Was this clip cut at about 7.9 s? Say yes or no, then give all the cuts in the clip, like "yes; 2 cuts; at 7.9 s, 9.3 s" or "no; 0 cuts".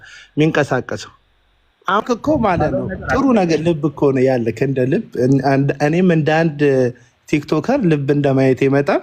no; 1 cut; at 2.0 s